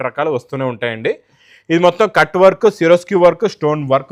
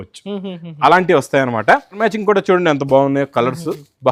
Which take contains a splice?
second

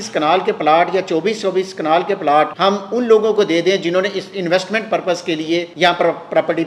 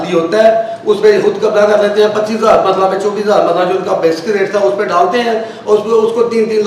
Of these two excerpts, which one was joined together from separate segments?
first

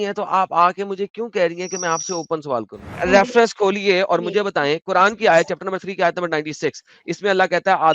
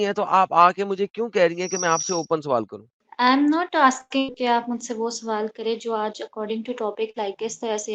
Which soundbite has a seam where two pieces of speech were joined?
first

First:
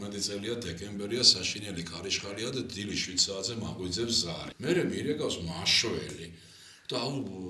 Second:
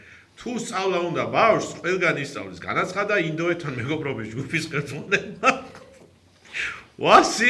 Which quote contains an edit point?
first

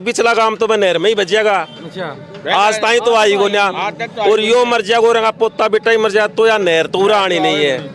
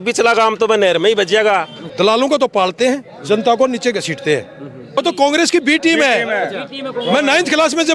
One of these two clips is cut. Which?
second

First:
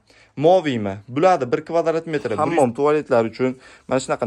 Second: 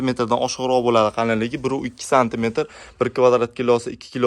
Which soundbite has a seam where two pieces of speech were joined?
first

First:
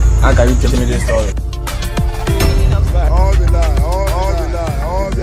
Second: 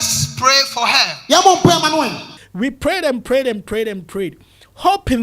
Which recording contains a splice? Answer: second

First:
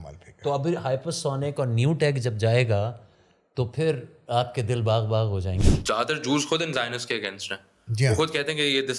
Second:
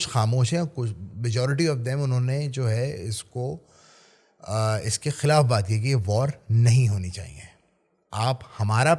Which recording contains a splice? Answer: first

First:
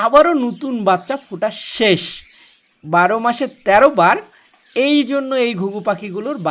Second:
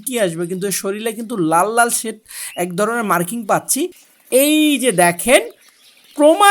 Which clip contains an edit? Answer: second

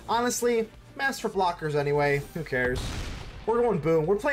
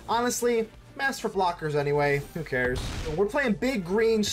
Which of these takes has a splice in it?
second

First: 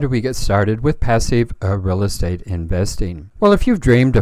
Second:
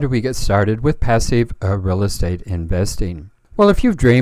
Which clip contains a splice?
first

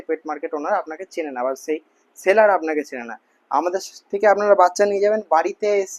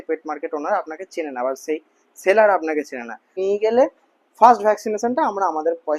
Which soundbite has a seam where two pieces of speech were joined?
second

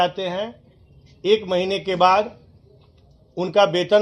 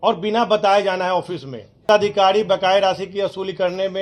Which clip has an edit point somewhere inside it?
second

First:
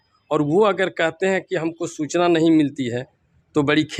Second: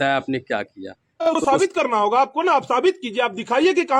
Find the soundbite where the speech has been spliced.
second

